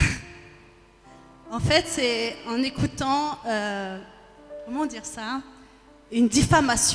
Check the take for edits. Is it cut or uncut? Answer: uncut